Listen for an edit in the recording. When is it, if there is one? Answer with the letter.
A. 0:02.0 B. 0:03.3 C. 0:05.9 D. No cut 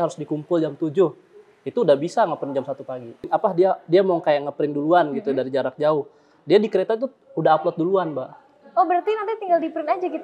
B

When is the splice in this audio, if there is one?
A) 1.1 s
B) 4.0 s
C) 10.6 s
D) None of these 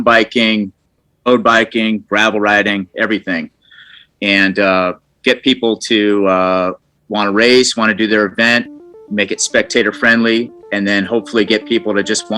A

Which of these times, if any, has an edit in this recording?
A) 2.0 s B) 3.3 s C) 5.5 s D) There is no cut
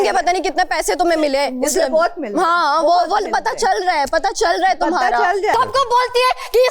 C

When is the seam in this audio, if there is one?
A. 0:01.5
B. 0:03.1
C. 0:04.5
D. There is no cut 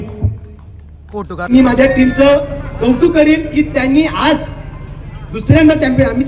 A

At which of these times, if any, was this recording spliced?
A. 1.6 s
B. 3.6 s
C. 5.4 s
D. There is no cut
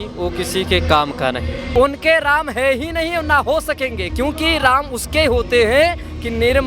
A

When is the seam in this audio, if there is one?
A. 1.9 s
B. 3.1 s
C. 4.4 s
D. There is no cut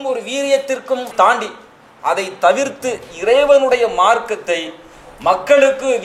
D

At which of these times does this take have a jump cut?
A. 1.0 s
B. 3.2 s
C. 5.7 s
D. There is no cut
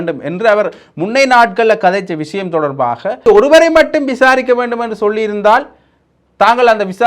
B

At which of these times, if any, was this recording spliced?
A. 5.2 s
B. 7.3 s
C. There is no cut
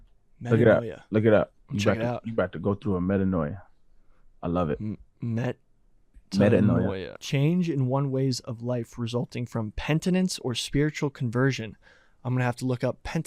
B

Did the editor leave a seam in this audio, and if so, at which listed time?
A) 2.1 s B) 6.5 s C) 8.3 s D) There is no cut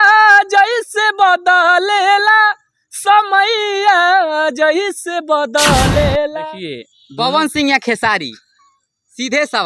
B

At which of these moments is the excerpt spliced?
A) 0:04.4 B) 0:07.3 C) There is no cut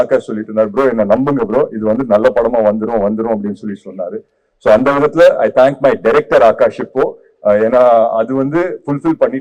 C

